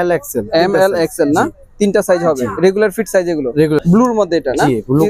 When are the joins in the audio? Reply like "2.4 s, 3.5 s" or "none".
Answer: 3.8 s

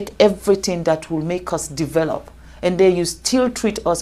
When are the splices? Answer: none

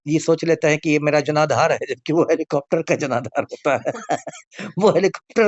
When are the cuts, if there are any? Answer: none

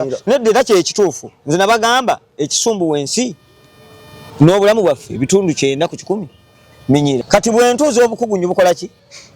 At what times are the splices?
7.2 s

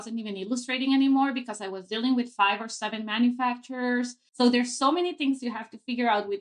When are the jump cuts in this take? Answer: 4.2 s

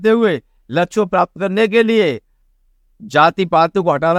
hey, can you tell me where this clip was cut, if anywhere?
none

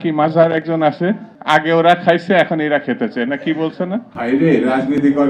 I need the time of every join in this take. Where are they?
1.3 s, 4.1 s

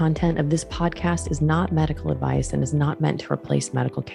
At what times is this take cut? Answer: none

